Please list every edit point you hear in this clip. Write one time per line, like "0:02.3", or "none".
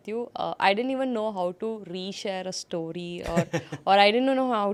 none

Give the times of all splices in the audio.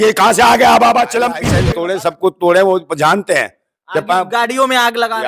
0:01.5

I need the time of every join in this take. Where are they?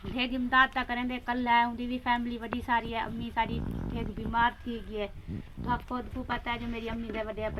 none

